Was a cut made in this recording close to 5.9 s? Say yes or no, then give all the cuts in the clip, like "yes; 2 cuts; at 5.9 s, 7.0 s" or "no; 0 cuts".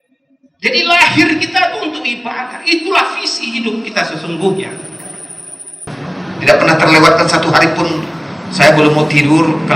yes; 1 cut; at 5.9 s